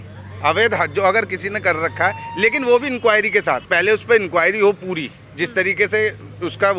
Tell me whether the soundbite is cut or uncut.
cut